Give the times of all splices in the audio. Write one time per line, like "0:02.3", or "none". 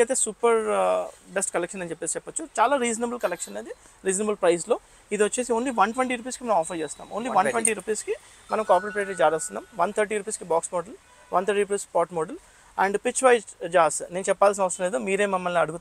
none